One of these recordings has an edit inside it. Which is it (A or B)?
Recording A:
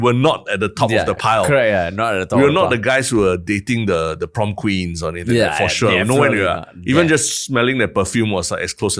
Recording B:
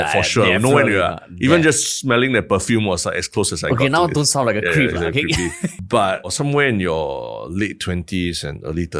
B